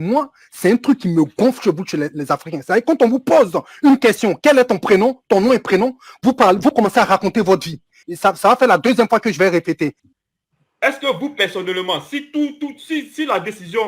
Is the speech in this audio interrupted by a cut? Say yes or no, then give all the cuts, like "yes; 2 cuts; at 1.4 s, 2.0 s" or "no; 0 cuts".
yes; 1 cut; at 10.0 s